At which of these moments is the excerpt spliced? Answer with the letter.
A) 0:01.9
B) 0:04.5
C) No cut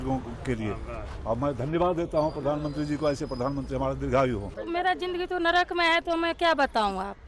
B